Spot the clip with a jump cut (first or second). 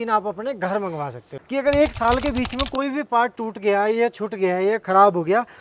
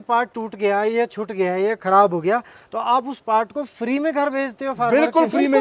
first